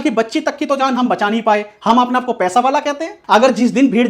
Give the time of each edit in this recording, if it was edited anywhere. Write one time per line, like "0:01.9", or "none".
0:03.1